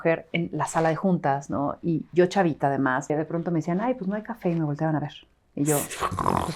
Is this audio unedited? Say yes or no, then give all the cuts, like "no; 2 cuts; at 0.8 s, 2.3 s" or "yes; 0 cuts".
no; 1 cut; at 3.1 s